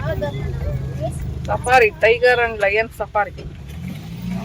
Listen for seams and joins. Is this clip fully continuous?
yes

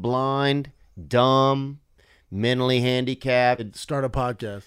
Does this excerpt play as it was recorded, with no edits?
no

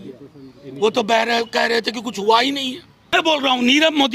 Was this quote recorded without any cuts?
no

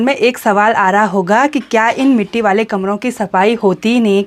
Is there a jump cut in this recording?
no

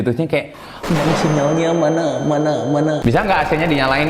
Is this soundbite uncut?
no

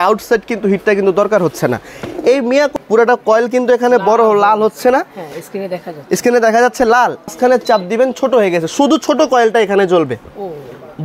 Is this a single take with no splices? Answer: no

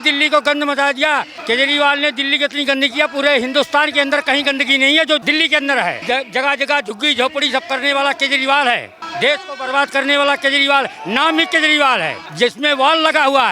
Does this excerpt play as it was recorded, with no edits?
no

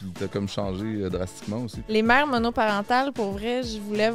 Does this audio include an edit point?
yes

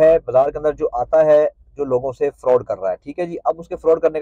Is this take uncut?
yes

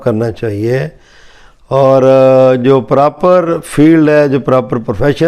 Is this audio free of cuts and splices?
yes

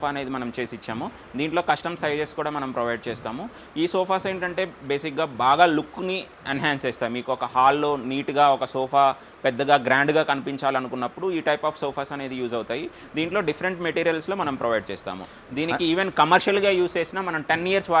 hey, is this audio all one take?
yes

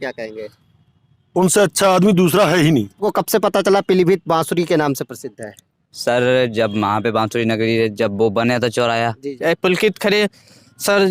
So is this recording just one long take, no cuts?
no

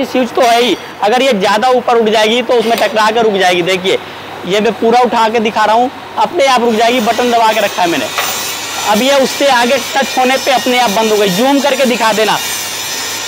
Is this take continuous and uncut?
yes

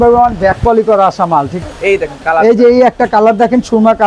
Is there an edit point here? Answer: yes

